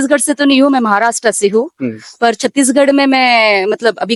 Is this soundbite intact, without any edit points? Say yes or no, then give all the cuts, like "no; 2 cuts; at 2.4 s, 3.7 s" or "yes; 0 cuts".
yes; 0 cuts